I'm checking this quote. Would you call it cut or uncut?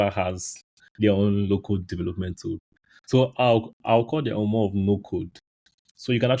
uncut